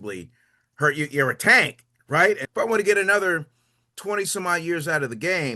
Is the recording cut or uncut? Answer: cut